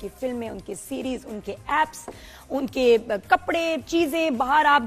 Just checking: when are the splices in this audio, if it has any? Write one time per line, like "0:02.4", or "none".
none